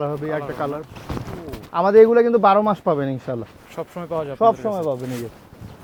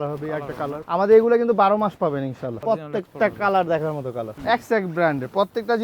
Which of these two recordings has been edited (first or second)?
second